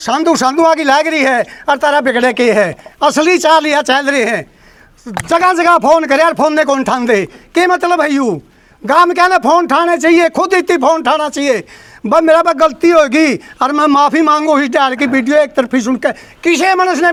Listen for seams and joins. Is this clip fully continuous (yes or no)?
yes